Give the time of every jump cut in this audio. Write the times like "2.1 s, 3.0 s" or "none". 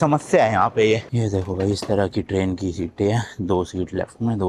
1.1 s